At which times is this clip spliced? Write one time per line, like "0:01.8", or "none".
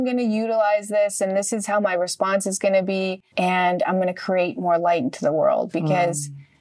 0:03.2